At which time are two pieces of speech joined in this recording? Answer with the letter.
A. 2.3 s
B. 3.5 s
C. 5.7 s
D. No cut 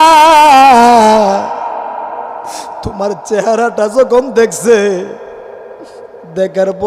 D